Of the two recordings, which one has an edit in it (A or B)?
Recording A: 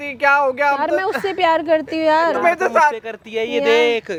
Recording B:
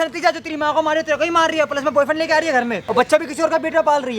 B